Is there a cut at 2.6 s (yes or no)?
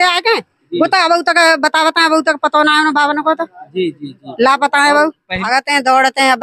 no